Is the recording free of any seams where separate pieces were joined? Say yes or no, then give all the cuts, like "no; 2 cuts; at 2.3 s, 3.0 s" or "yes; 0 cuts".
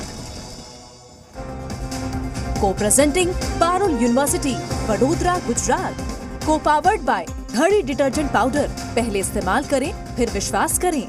no; 1 cut; at 1.1 s